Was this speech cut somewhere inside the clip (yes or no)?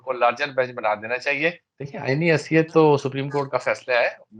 yes